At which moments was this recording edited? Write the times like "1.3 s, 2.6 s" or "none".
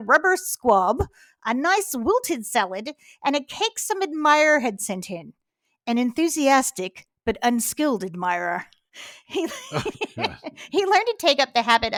none